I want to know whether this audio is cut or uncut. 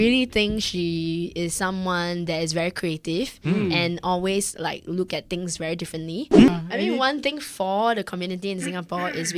cut